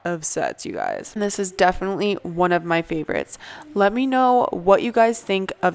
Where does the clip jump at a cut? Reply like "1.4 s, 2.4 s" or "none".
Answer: none